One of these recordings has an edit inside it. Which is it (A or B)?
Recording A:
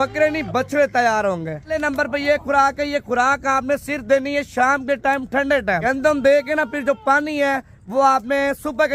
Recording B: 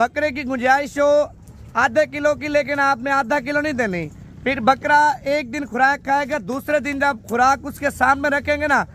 A